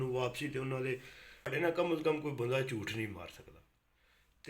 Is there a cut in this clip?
yes; 1 cut; at 1.5 s

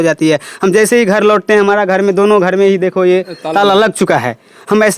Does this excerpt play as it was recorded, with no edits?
yes; 0 cuts

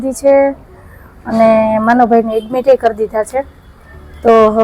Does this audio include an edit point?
no; 0 cuts

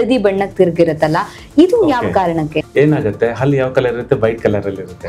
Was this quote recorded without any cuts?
no; 1 cut; at 2.6 s

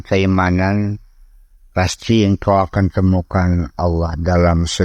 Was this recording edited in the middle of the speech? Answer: no; 0 cuts

